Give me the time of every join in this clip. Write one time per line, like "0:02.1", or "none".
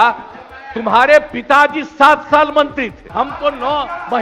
0:03.0